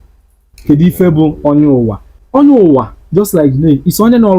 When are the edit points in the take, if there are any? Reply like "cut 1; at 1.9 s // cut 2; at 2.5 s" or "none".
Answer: cut 1; at 2.1 s